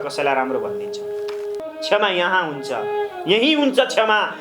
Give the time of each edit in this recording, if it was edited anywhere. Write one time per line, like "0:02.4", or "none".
0:01.6